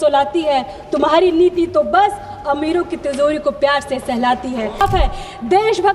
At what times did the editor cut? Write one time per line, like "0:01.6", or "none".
0:04.8